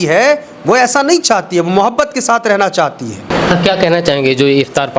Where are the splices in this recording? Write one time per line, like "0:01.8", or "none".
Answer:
0:03.2